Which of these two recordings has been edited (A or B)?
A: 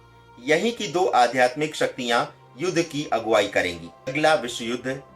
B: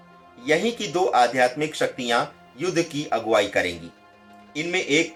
A